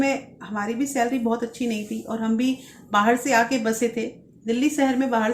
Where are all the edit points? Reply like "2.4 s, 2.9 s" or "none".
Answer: none